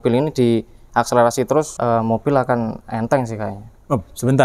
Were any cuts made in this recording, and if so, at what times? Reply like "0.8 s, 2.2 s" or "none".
1.7 s